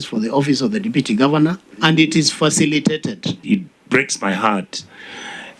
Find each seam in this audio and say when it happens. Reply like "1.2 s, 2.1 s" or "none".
3.3 s